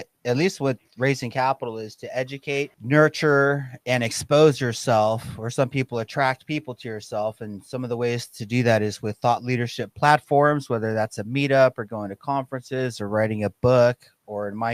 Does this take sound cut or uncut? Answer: cut